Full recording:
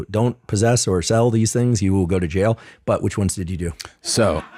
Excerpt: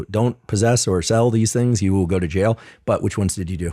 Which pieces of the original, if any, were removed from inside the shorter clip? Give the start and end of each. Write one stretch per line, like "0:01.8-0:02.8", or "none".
none